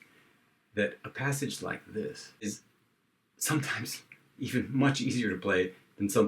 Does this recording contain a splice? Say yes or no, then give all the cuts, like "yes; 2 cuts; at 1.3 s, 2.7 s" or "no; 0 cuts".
yes; 1 cut; at 2.5 s